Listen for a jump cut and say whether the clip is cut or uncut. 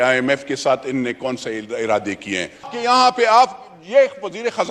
cut